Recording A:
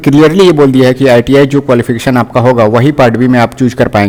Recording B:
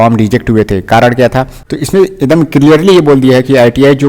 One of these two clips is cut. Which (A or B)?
B